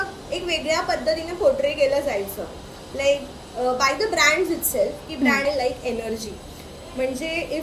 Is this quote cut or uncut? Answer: cut